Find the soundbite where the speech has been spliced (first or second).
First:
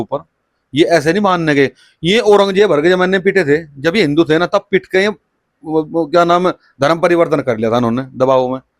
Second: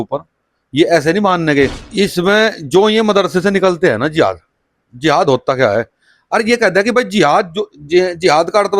second